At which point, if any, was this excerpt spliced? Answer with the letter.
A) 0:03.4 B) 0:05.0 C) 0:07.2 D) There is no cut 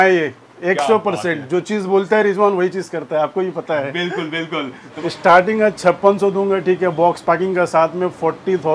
B